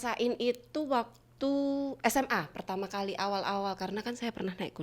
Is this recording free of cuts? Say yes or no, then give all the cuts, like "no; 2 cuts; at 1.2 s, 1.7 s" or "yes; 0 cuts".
yes; 0 cuts